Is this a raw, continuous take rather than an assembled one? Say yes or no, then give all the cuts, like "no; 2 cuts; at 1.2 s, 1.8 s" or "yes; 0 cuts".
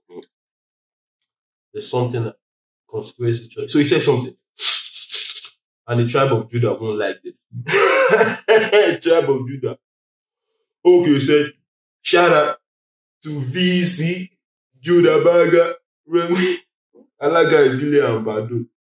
yes; 0 cuts